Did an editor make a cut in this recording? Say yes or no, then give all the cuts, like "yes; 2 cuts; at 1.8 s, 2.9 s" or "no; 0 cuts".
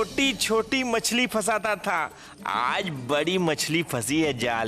no; 0 cuts